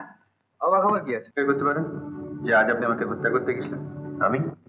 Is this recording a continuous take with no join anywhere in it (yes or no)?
no